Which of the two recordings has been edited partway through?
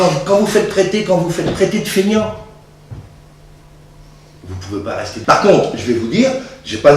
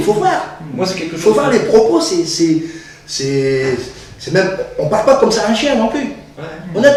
first; 1 cut; at 5.2 s

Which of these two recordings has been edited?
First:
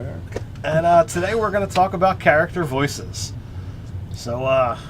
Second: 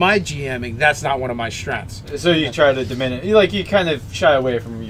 first; 1 cut; at 1.1 s

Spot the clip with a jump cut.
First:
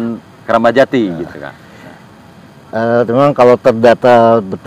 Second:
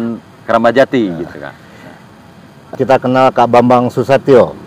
second; 1 cut; at 2.7 s

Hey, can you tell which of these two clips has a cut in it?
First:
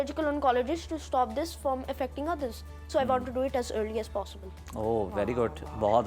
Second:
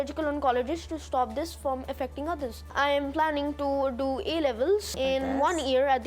second; 2 cuts; at 2.7 s, 4.9 s

